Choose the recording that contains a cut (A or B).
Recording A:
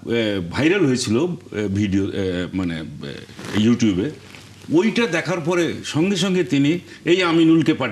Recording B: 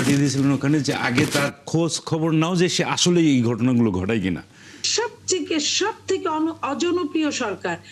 B